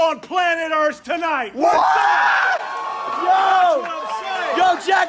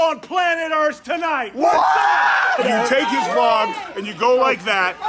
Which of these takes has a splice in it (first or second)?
second